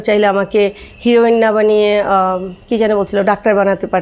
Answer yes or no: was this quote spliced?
no